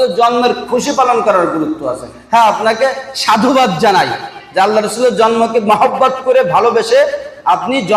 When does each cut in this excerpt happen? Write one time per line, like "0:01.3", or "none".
none